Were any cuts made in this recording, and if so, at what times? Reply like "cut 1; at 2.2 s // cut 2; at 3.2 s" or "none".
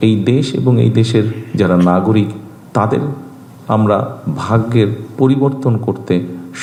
none